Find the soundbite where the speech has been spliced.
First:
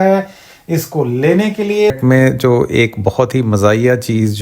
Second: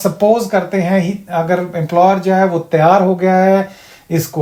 first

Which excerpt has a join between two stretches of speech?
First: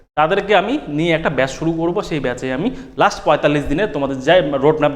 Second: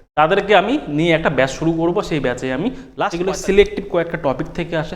second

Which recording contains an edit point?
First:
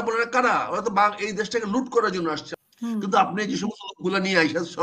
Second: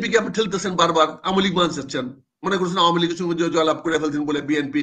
first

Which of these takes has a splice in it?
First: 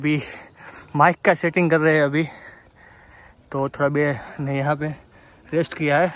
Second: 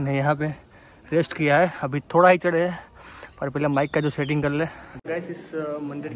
second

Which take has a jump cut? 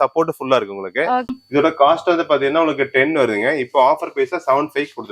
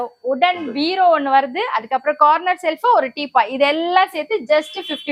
first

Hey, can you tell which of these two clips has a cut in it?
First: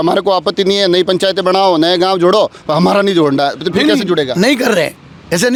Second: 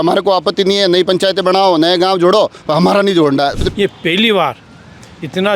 second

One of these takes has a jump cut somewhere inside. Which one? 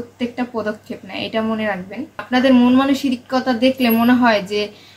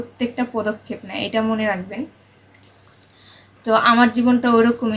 first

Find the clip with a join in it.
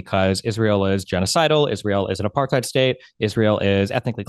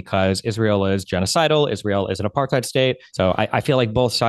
second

